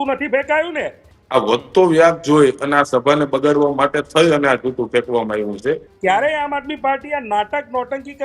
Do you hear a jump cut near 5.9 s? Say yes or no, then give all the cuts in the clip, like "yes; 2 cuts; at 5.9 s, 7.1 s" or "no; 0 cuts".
yes; 2 cuts; at 1.1 s, 5.9 s